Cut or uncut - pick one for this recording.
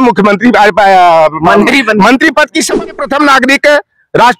cut